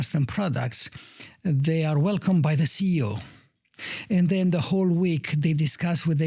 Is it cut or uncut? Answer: uncut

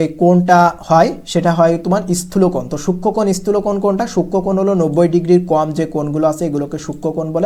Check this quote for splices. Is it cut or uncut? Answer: uncut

